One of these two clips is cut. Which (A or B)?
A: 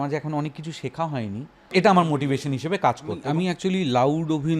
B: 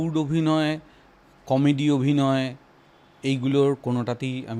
A